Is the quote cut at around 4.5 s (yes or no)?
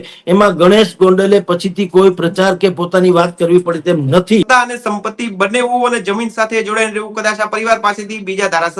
yes